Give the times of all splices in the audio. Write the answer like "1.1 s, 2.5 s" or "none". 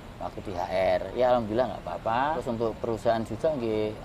2.4 s